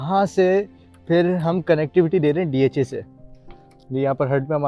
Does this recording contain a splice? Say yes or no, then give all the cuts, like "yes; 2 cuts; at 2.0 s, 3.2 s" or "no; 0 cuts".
no; 0 cuts